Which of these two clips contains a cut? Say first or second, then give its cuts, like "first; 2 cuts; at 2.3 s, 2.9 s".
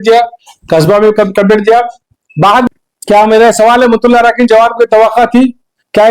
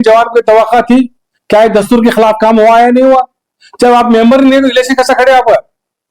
first; 1 cut; at 2.7 s